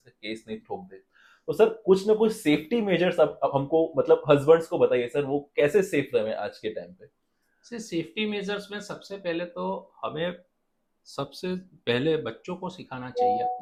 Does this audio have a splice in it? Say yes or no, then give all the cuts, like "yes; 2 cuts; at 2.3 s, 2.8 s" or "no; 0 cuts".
no; 0 cuts